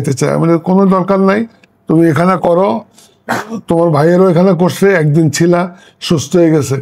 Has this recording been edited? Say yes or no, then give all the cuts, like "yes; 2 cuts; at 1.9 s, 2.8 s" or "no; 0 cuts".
no; 0 cuts